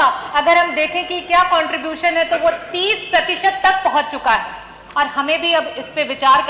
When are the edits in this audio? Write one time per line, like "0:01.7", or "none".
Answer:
none